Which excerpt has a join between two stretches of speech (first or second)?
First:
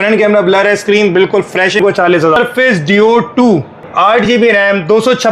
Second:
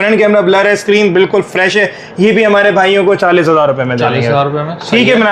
first